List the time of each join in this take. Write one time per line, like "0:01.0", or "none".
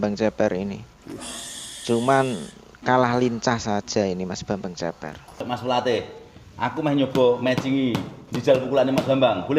0:05.4